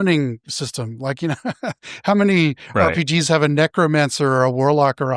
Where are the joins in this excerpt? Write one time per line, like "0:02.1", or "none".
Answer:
none